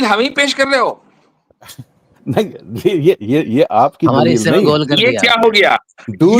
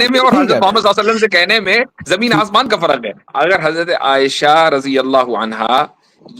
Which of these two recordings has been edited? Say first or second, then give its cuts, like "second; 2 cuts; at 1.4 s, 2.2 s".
second; 1 cut; at 3.2 s